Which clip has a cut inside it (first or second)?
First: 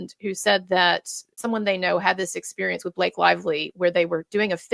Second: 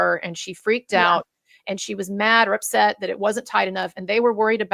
first